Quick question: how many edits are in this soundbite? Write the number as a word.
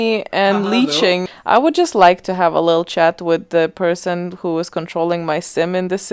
one